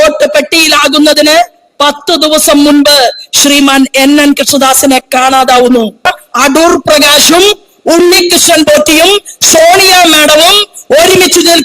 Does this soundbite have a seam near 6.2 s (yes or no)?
yes